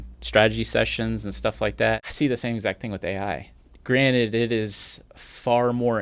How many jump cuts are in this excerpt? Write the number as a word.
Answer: one